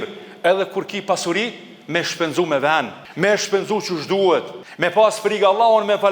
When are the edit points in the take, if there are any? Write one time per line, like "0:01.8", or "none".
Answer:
0:03.0
0:04.6